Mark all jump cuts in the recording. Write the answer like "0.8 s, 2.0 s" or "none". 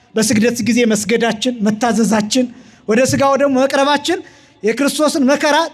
none